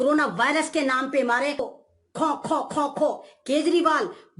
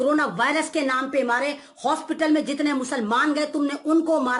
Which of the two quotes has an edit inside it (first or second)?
first